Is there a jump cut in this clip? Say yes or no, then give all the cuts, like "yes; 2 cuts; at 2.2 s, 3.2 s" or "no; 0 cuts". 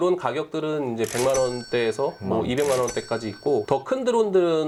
no; 0 cuts